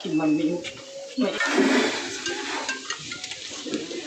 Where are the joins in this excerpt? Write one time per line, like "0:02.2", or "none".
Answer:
0:01.3